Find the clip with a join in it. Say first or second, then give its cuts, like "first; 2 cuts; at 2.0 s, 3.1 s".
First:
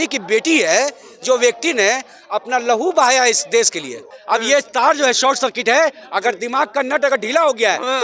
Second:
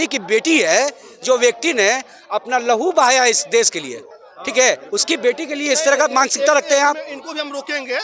first; 1 cut; at 4.1 s